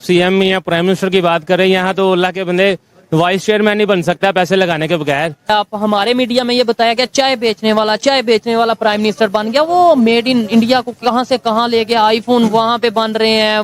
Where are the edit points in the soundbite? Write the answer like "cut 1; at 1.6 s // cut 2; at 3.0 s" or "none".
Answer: cut 1; at 5.5 s